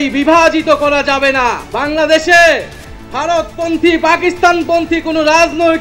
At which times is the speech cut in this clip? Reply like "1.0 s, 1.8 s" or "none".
1.7 s